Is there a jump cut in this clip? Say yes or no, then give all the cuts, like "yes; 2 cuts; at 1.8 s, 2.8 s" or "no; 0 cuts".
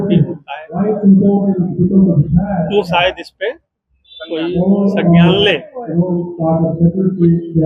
no; 0 cuts